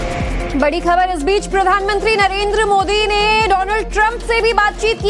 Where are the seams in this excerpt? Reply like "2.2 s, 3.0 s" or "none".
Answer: none